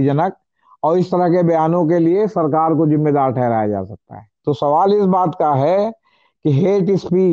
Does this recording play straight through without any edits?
no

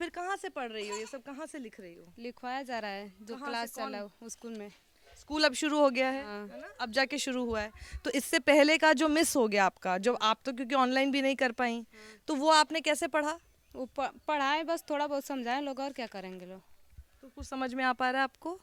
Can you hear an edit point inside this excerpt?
no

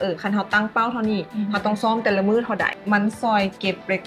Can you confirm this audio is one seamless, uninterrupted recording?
no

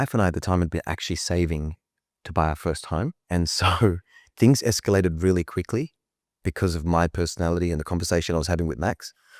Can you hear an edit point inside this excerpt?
yes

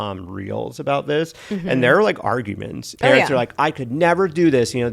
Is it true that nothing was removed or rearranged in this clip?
no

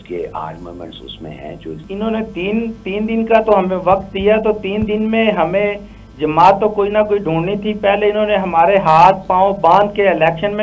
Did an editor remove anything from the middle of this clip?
yes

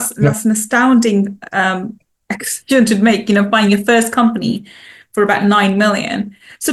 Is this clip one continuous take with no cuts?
yes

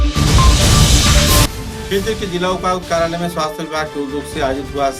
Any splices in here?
yes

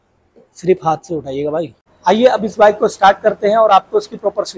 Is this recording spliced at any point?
yes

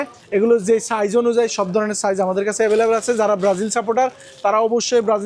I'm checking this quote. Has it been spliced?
no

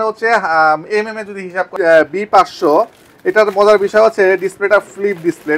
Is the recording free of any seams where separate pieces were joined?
no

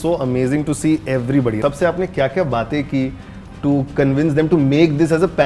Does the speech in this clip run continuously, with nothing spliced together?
no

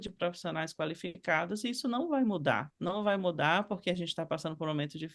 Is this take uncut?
no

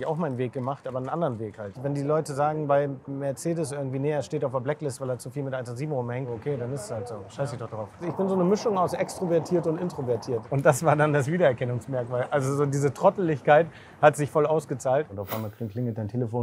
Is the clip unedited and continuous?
no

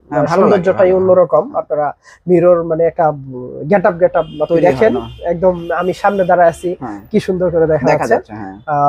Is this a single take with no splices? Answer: yes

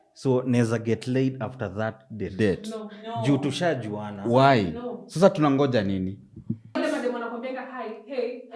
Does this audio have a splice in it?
yes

